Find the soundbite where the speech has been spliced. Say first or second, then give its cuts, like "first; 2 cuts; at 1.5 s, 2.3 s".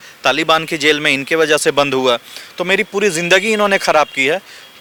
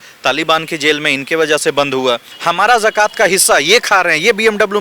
second; 1 cut; at 2.3 s